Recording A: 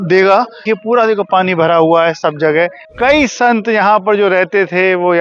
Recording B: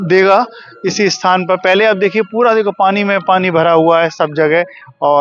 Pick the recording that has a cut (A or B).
A